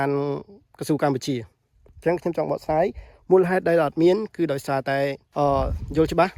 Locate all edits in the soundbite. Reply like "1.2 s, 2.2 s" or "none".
5.2 s